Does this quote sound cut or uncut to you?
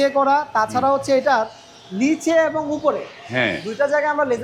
uncut